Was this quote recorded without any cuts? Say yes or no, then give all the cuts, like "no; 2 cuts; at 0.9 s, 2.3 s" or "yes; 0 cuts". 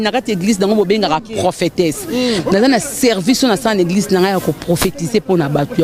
yes; 0 cuts